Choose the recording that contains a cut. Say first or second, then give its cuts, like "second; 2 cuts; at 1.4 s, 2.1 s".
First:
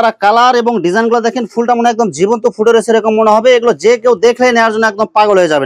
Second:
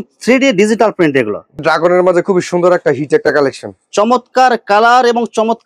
second; 1 cut; at 1.6 s